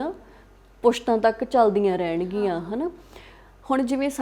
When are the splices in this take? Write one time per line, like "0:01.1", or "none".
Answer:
none